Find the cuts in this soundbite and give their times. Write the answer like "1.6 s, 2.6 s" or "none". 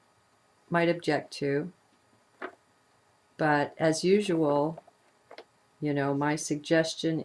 3.6 s